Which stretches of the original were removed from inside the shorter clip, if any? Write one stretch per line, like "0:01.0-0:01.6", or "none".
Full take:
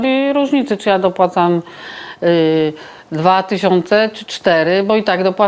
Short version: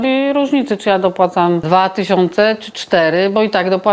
0:01.6-0:03.2